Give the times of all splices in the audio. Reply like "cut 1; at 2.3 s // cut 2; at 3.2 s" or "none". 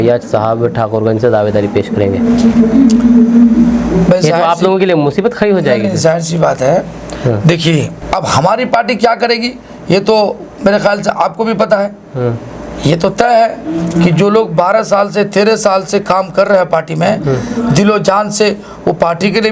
cut 1; at 8.0 s